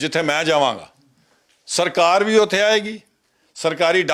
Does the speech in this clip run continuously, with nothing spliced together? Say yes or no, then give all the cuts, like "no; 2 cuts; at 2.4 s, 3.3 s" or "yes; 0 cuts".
yes; 0 cuts